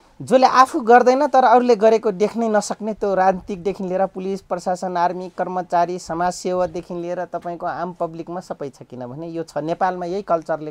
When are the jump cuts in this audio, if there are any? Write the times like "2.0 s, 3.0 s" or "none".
none